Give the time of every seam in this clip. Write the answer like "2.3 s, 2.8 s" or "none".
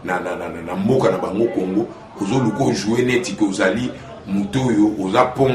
none

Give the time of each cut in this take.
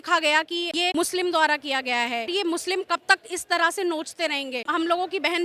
0.9 s, 2.3 s

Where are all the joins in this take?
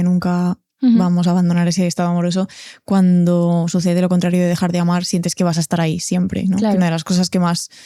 none

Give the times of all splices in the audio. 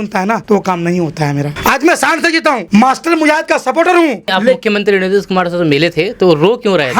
1.5 s, 4.3 s

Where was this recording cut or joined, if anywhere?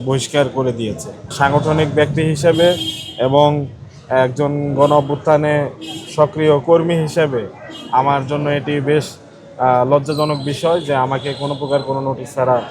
1.2 s

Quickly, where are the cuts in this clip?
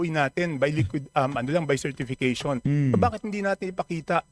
none

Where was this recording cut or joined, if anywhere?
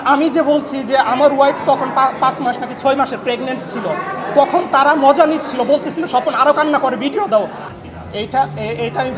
7.6 s

